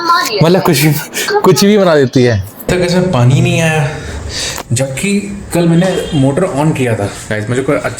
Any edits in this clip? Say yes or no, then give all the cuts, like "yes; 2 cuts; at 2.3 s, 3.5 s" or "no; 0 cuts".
yes; 1 cut; at 2.5 s